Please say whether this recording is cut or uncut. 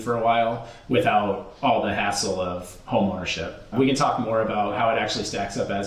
cut